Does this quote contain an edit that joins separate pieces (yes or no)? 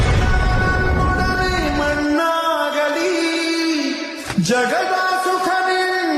no